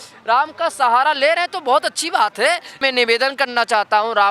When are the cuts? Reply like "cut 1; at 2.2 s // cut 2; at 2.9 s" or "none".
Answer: cut 1; at 2.8 s

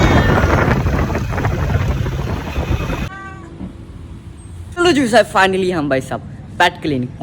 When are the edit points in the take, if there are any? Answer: cut 1; at 3.1 s // cut 2; at 4.7 s

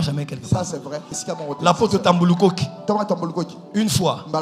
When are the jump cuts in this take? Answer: cut 1; at 1.1 s

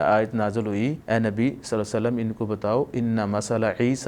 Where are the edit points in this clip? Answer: cut 1; at 1.0 s

